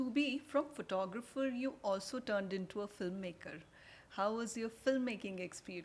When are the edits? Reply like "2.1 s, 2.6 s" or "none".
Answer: none